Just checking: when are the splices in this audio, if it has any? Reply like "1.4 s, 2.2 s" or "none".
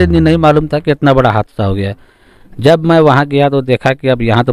none